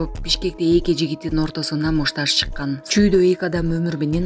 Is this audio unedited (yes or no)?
no